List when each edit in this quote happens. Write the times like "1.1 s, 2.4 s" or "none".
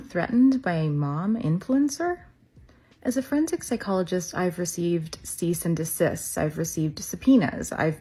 none